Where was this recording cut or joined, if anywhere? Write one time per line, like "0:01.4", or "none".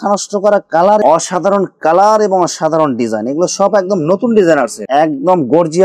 0:01.0
0:04.8